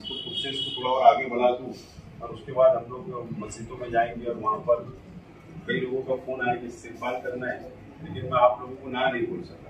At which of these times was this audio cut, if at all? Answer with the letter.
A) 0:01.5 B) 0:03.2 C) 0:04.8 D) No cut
D